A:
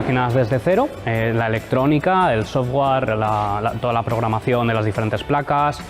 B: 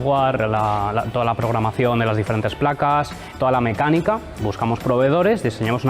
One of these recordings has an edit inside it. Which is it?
B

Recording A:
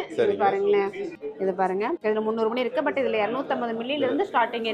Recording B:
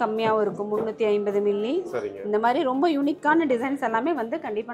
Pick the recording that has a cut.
A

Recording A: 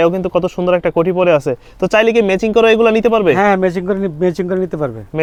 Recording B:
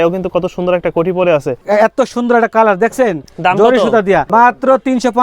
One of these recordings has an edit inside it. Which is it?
B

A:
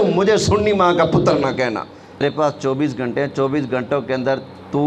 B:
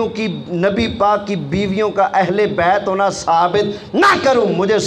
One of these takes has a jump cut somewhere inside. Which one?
A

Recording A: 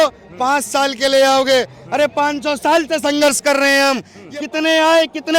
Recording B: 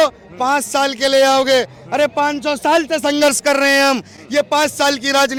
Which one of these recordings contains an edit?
A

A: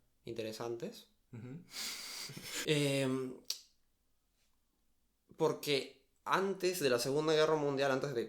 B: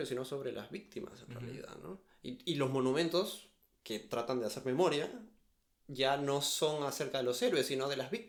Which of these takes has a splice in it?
A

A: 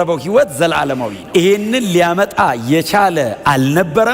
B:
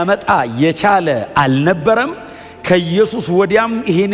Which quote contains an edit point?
A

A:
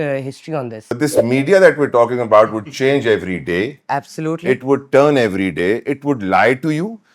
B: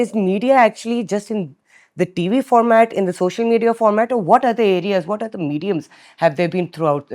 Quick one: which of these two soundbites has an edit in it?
A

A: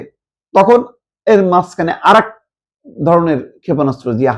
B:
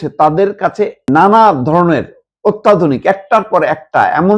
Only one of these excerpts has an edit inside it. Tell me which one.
B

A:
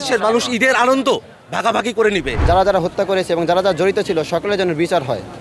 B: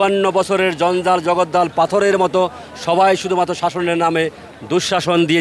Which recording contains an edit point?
A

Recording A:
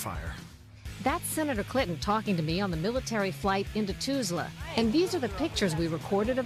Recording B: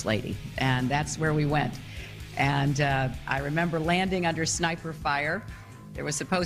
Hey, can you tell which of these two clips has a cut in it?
B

